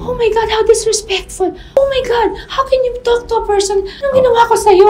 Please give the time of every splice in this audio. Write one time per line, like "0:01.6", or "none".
0:01.6
0:04.0